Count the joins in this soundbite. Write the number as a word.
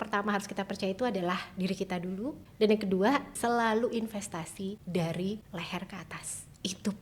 four